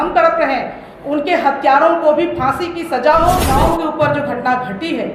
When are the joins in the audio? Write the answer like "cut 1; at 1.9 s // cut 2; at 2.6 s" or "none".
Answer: cut 1; at 3.5 s